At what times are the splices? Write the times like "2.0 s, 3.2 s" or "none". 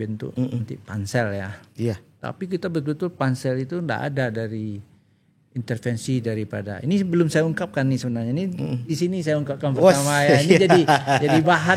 none